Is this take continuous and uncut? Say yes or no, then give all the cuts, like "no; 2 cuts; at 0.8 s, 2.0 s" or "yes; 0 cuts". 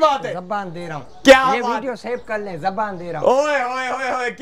yes; 0 cuts